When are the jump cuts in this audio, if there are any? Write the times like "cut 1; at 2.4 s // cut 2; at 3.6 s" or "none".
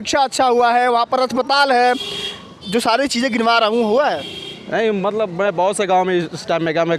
none